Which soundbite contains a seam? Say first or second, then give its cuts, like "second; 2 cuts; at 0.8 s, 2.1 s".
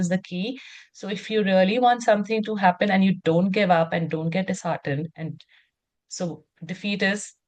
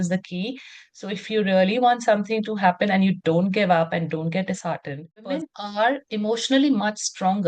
second; 1 cut; at 5.6 s